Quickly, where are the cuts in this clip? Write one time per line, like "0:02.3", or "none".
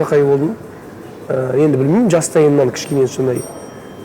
none

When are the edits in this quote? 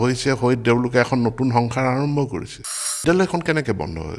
0:03.0

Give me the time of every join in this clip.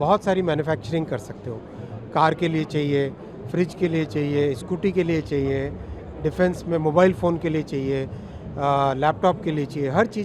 none

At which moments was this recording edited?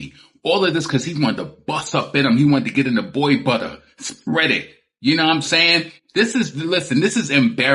none

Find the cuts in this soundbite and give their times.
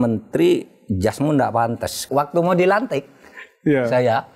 0:02.0

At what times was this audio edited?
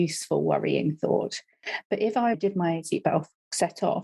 0:02.4

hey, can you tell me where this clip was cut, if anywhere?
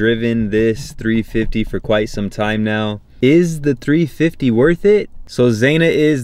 0:05.2

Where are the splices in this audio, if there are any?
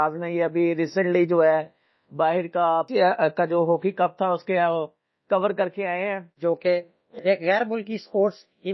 0:02.9
0:06.4

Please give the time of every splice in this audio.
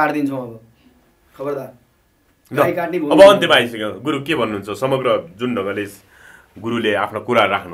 none

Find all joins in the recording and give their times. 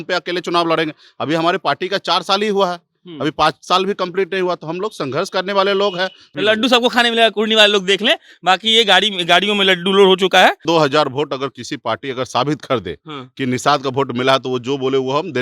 0:06.2
0:10.6

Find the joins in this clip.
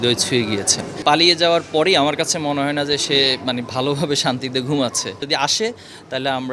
0:01.0
0:05.2

